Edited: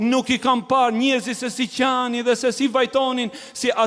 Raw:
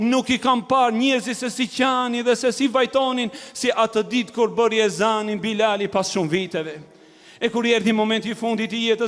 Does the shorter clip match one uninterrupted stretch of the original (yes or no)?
yes